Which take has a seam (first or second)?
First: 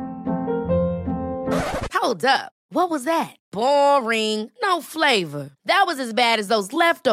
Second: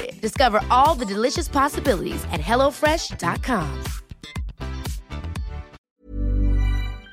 second